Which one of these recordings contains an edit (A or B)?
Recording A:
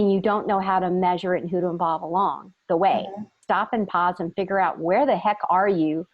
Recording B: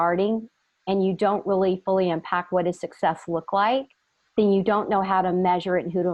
A